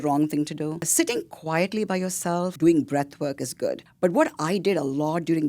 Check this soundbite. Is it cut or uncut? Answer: cut